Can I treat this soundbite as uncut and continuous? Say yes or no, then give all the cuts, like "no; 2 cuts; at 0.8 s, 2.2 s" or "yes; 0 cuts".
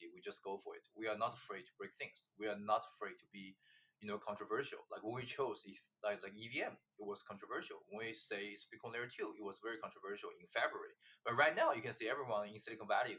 yes; 0 cuts